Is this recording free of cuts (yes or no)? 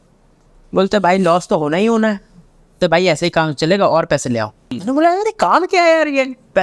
no